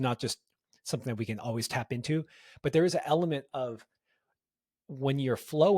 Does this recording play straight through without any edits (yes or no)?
yes